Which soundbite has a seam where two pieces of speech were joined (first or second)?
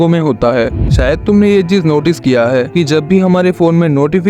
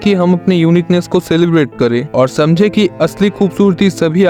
first